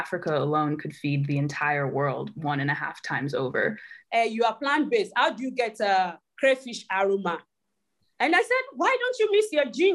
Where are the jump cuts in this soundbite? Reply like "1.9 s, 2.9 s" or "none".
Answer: 4.0 s